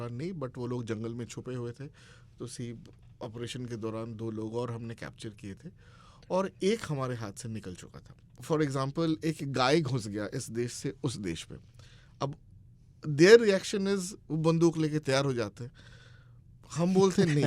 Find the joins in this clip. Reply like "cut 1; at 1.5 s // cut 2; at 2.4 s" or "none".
cut 1; at 8.4 s

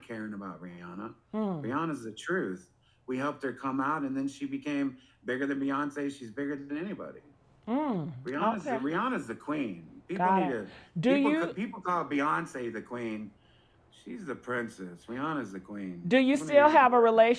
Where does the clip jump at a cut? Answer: none

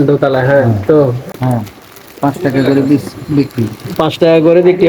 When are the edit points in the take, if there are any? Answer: cut 1; at 1.2 s

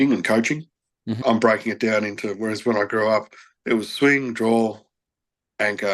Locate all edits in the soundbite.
cut 1; at 1.2 s

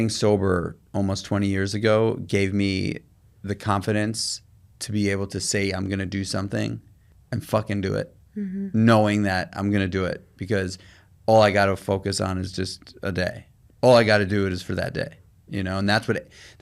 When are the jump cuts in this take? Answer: none

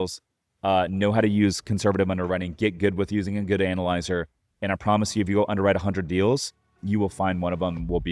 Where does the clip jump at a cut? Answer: cut 1; at 6.7 s

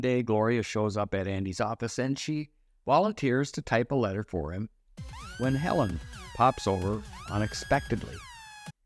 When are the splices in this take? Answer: none

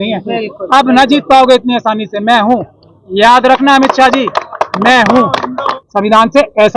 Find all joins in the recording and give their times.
cut 1; at 5.7 s

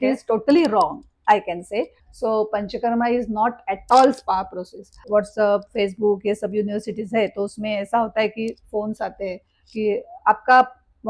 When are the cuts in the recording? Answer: cut 1; at 2.0 s // cut 2; at 5.0 s

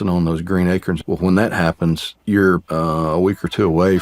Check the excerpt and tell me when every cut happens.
cut 1; at 1.0 s // cut 2; at 2.1 s // cut 3; at 2.6 s

